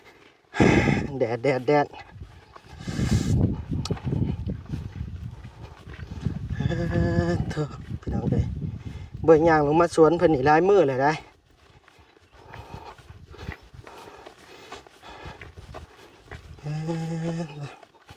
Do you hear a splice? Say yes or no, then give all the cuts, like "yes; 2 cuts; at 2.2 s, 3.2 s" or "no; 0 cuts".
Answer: no; 0 cuts